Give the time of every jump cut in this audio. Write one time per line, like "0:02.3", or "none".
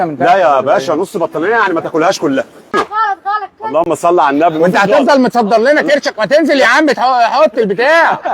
0:02.7